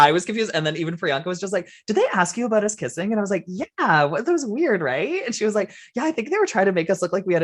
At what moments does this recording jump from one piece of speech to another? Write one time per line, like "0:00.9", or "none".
none